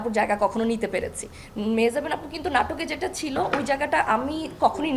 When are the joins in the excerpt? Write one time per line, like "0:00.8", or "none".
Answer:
none